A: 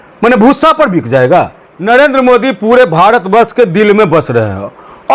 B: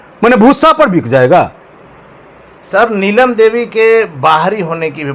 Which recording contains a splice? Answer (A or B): A